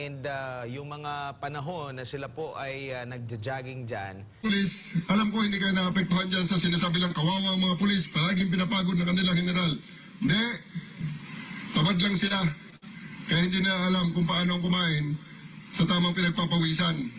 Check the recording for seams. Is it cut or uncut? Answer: cut